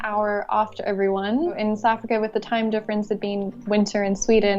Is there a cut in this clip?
yes; 1 cut; at 1.6 s

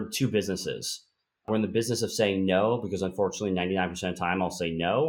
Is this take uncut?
no; 1 cut; at 1.5 s

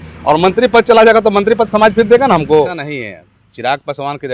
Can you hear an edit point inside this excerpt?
yes; 1 cut; at 2.8 s

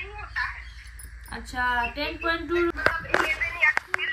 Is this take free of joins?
no; 1 cut; at 2.7 s

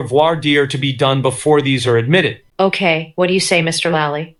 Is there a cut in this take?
no; 0 cuts

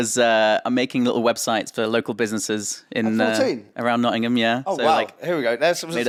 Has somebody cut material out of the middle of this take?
no; 0 cuts

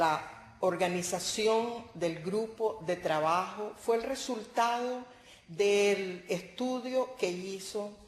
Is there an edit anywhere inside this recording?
yes; 1 cut; at 6.8 s

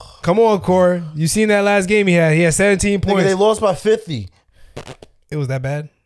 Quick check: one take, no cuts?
yes; 0 cuts

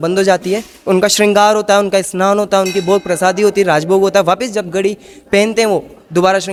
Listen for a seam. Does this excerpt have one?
no; 0 cuts

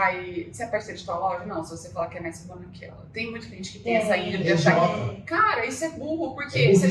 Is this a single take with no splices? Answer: yes; 0 cuts

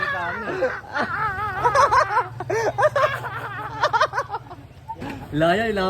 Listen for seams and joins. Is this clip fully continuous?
no; 1 cut; at 5.0 s

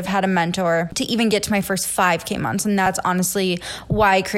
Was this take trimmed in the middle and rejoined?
yes; 2 cuts; at 1.0 s, 2.9 s

